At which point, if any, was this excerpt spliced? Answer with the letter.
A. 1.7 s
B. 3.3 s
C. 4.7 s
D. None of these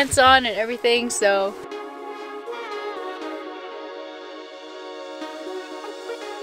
D